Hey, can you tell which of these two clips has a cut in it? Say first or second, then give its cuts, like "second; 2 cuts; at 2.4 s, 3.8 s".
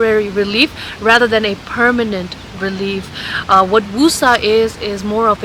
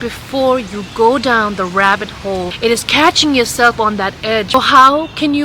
second; 2 cuts; at 2.5 s, 4.5 s